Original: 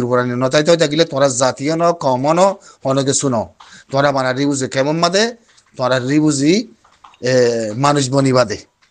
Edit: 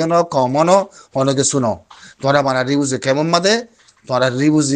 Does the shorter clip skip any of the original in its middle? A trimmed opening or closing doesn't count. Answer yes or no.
no